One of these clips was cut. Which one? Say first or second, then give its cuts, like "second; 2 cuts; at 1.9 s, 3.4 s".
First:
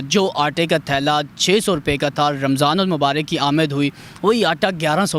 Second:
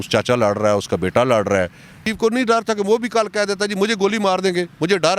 second; 1 cut; at 2.0 s